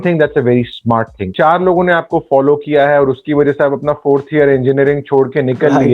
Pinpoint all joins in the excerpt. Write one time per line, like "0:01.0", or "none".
0:01.3